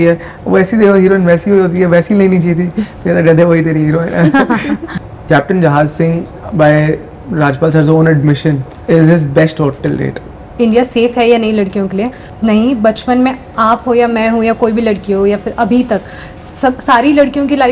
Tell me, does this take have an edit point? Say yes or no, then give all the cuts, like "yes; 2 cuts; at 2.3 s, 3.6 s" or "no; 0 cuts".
yes; 4 cuts; at 4.9 s, 6.3 s, 10.4 s, 12.3 s